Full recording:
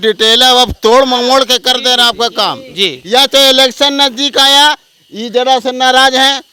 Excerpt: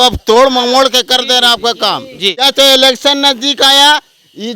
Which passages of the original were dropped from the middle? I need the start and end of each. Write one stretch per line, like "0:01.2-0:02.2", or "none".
0:03.0-0:03.2